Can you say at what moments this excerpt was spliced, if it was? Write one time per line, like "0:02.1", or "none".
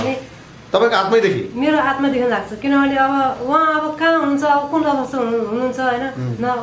none